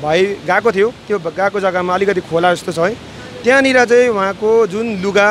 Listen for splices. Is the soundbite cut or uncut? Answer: uncut